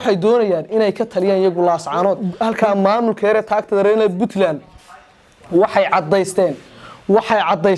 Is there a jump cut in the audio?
yes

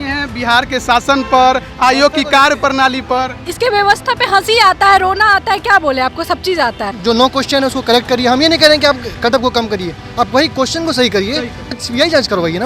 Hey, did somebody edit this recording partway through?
yes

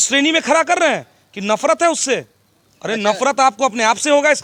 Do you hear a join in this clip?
no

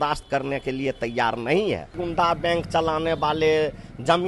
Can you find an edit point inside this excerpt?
yes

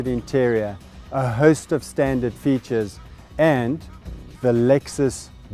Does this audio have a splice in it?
yes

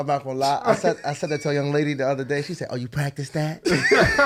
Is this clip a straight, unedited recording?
yes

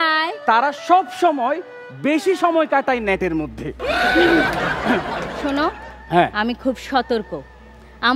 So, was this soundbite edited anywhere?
no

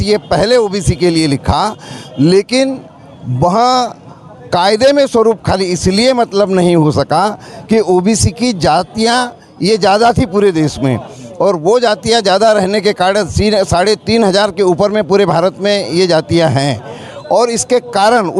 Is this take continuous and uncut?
yes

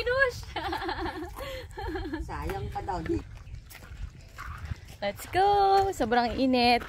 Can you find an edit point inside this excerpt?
yes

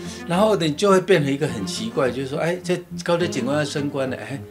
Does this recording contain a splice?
no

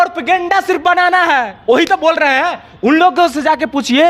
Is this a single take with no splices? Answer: yes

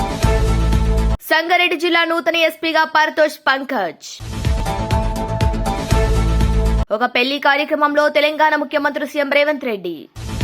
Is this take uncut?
yes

